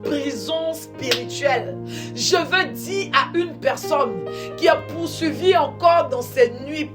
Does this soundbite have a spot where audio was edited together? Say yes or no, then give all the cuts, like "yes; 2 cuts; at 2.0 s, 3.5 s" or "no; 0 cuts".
no; 0 cuts